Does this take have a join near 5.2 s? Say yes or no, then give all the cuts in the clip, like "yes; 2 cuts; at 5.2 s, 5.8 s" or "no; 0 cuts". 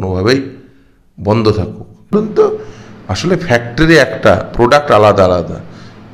no; 1 cut; at 2.1 s